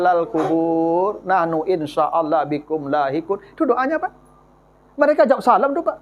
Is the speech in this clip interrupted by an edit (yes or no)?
no